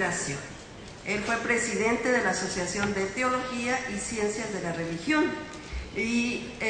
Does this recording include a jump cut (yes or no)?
yes